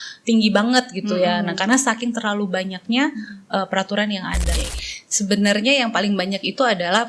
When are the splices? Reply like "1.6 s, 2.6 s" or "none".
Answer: 4.5 s